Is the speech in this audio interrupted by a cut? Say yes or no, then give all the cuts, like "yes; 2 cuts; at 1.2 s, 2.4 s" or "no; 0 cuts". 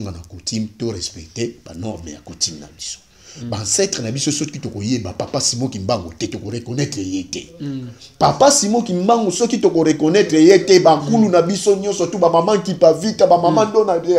no; 0 cuts